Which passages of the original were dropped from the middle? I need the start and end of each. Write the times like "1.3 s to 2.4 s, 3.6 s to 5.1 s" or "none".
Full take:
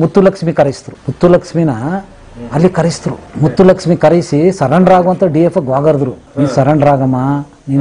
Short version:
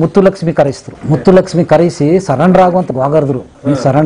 0.9 s to 3.2 s, 5.2 s to 5.6 s